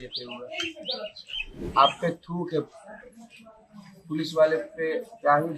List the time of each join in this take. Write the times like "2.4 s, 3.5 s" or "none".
1.6 s